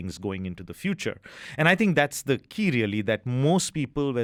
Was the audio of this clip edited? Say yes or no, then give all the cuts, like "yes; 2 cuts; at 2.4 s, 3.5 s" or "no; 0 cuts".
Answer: no; 0 cuts